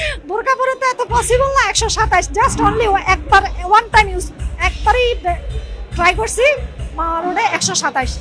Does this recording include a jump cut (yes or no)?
no